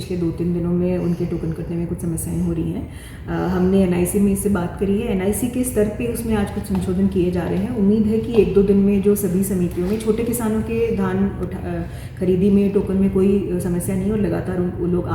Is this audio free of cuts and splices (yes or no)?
yes